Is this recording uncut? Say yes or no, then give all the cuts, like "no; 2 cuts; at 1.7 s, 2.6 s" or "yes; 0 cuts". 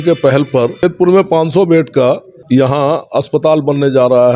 no; 2 cuts; at 0.8 s, 2.3 s